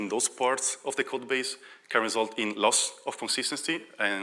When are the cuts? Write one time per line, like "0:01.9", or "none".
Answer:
none